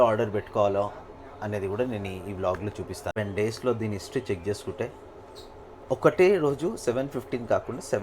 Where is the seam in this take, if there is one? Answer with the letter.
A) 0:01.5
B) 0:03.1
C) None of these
B